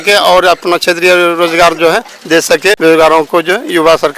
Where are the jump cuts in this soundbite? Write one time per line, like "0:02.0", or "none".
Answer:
0:02.8